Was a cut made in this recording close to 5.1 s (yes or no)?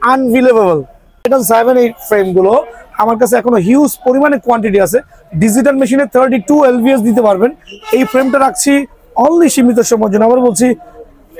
no